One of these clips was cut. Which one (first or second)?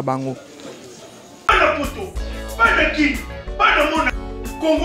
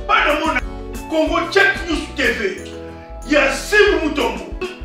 first